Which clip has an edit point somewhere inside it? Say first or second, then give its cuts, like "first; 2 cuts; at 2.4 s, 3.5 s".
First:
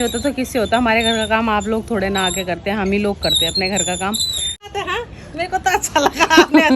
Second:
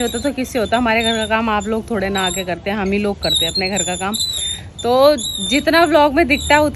first; 1 cut; at 4.7 s